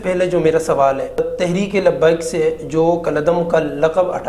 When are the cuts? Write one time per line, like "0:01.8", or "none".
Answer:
0:01.2